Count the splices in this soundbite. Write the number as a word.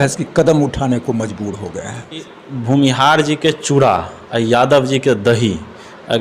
one